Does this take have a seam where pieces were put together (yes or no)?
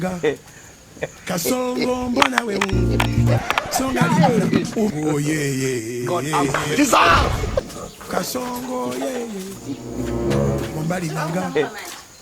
yes